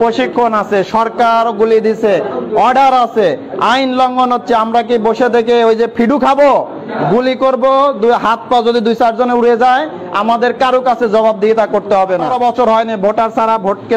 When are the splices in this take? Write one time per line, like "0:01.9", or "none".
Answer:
0:06.8
0:12.3